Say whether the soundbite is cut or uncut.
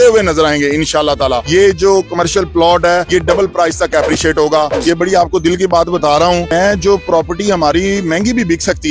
cut